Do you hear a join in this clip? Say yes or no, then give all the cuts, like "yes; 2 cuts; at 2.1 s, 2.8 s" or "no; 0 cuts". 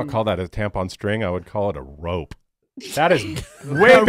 no; 0 cuts